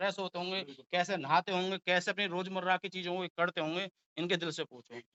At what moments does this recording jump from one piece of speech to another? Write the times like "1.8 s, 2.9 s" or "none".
none